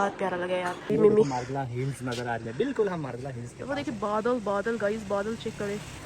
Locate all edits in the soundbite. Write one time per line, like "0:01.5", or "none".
0:00.9